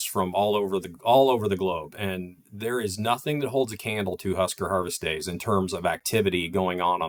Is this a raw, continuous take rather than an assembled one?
yes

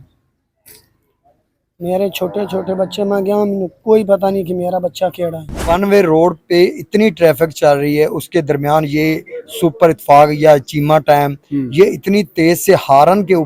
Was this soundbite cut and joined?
yes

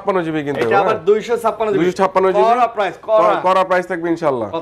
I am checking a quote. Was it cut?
no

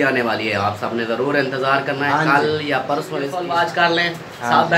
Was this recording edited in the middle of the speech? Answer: yes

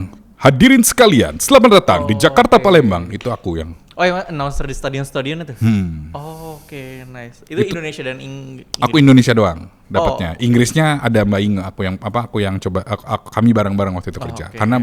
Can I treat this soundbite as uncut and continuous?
yes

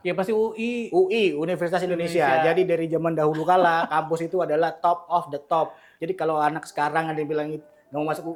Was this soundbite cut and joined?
no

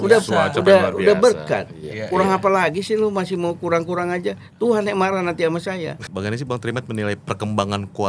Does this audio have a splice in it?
yes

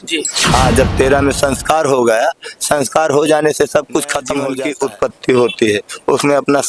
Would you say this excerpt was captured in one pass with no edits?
no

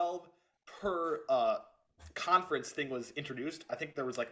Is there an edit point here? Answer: no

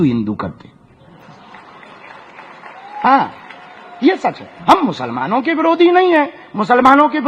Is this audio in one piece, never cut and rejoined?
yes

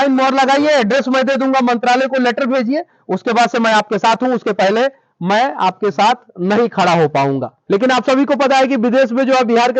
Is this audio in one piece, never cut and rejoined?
no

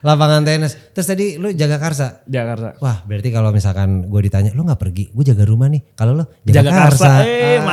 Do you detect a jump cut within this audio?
no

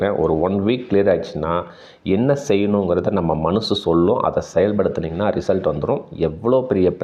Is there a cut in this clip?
no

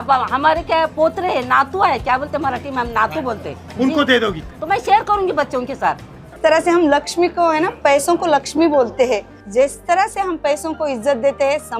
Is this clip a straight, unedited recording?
no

